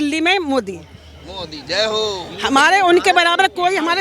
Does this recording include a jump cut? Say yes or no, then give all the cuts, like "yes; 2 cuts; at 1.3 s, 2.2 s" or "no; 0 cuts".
no; 0 cuts